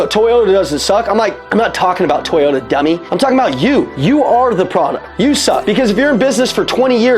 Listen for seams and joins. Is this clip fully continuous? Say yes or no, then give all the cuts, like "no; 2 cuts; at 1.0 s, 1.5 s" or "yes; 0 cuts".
no; 4 cuts; at 1.4 s, 3.1 s, 3.9 s, 5.5 s